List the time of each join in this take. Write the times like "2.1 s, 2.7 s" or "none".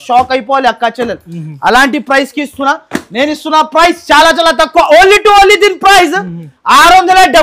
none

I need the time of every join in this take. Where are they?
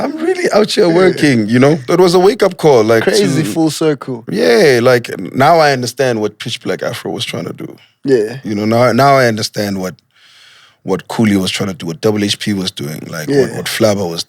1.8 s

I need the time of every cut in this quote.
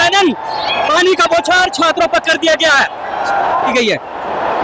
3.5 s

